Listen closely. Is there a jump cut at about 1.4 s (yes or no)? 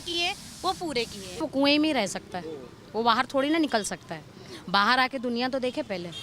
yes